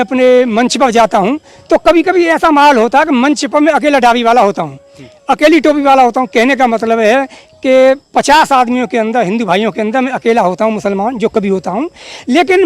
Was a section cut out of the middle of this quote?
no; 0 cuts

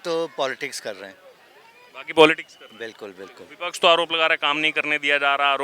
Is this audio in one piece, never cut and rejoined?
yes; 0 cuts

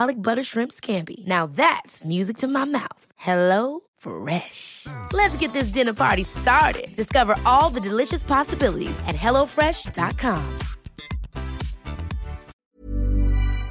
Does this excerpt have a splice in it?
yes; 1 cut; at 12.5 s

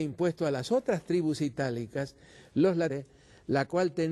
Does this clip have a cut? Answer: no; 0 cuts

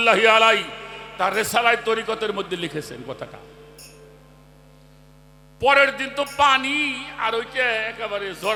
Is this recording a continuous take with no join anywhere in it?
yes; 0 cuts

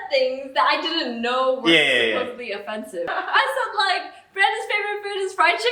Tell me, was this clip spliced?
yes; 1 cut; at 3.1 s

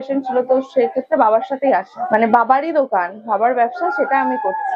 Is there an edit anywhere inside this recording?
yes; 1 cut; at 2.0 s

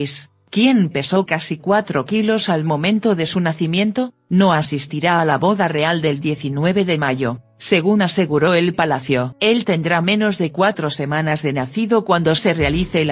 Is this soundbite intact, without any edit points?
yes; 0 cuts

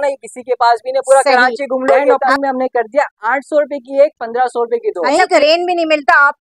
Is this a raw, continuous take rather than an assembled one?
no; 2 cuts; at 2.3 s, 5.4 s

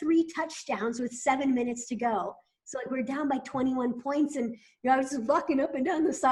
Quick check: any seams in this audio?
no; 0 cuts

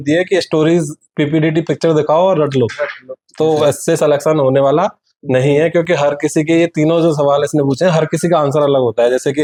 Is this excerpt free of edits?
yes; 0 cuts

